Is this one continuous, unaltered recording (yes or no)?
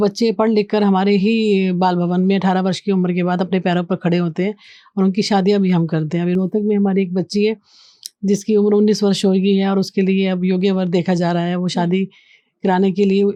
yes